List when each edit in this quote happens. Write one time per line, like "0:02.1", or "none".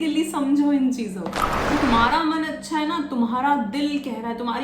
0:01.7